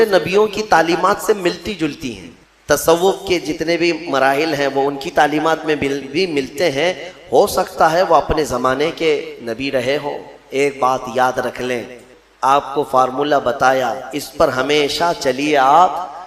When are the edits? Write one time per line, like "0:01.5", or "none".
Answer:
0:02.4
0:12.1